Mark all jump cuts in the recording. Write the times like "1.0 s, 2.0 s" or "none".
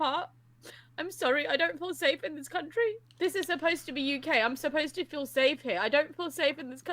3.1 s

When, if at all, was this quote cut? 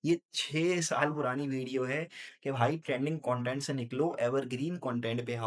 2.3 s

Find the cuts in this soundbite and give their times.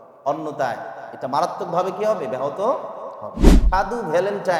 3.5 s

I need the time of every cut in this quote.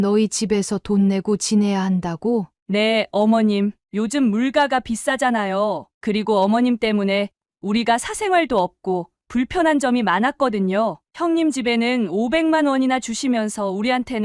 none

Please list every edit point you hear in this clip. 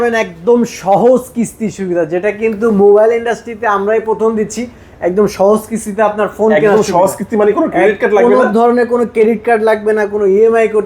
none

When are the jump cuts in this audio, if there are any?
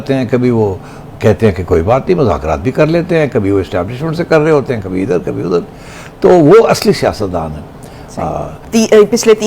none

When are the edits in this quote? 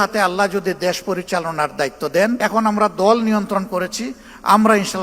2.4 s

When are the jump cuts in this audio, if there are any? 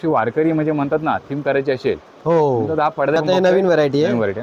3.2 s

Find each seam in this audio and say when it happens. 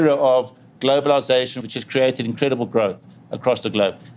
1.6 s

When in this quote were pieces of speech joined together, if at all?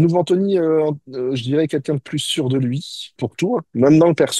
3.2 s

